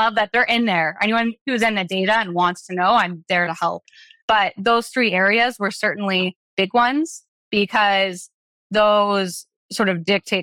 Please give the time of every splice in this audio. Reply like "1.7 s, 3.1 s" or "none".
none